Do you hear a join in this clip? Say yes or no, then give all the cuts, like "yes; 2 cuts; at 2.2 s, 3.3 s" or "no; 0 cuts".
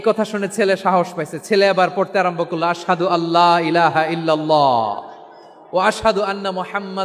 no; 0 cuts